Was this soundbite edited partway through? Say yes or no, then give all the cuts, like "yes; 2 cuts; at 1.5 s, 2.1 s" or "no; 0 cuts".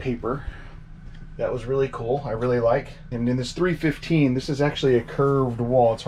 yes; 1 cut; at 3.0 s